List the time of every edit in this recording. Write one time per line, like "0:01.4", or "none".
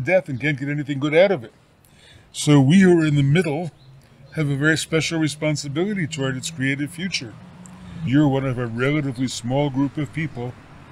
0:08.1